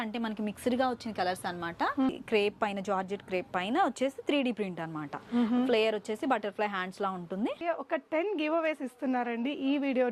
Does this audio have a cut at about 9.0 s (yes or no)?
no